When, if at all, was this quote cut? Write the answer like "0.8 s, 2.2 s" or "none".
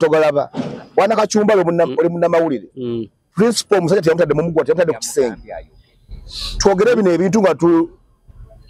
none

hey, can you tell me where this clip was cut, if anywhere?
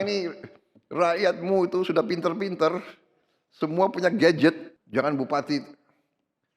4.7 s

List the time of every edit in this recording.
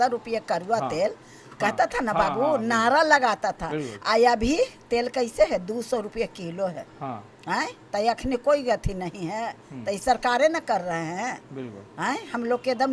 none

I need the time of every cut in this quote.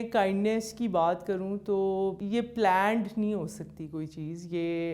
2.2 s

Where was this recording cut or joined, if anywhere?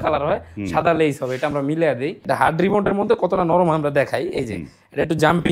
2.2 s

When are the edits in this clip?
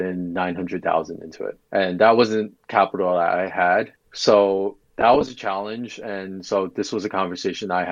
1.5 s, 2.6 s, 4.0 s

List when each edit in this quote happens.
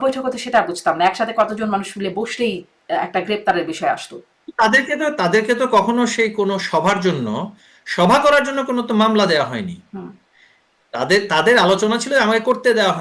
none

